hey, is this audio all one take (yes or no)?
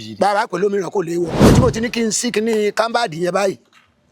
no